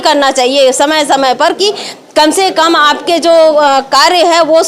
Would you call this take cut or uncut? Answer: uncut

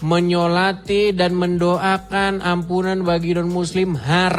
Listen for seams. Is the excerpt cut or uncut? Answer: uncut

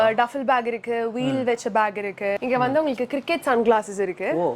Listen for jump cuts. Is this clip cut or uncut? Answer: cut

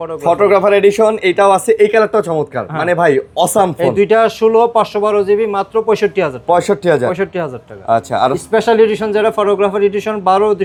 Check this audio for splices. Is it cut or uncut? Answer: uncut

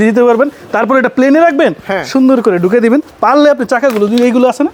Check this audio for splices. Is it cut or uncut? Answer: uncut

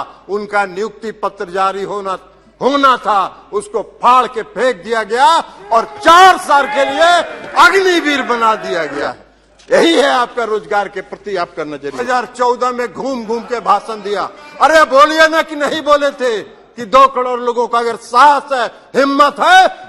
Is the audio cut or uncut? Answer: cut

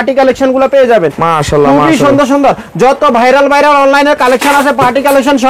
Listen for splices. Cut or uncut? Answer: uncut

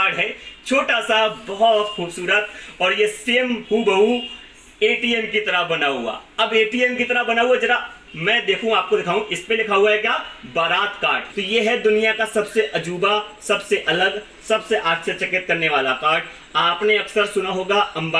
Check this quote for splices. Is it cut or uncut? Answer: cut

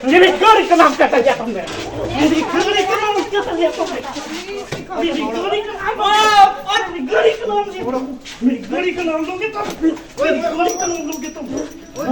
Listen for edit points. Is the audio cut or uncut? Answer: uncut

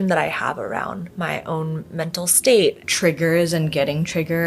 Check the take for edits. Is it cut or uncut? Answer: cut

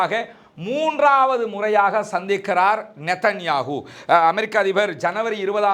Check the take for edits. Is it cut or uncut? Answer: uncut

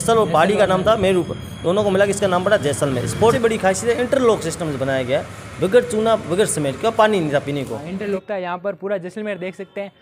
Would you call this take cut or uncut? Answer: cut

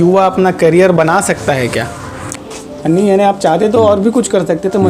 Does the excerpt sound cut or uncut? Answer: cut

